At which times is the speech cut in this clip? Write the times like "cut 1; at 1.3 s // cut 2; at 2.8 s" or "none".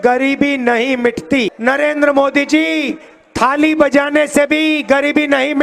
cut 1; at 1.5 s

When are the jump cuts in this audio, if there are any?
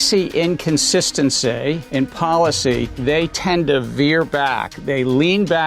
cut 1; at 1.8 s // cut 2; at 2.9 s // cut 3; at 4.8 s

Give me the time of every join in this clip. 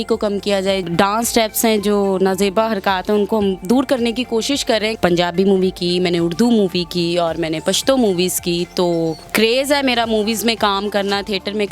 cut 1; at 0.8 s // cut 2; at 4.9 s // cut 3; at 9.2 s

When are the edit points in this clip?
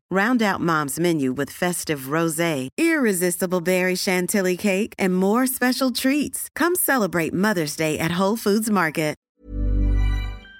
cut 1; at 9.2 s

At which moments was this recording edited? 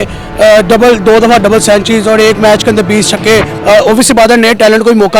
cut 1; at 3.5 s

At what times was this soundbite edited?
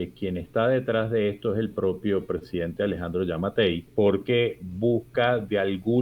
cut 1; at 3.8 s

